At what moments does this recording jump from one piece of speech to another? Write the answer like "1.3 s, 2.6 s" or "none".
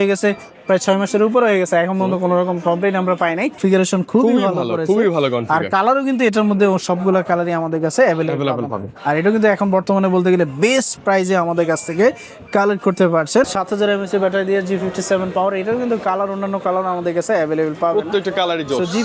3.6 s, 13.5 s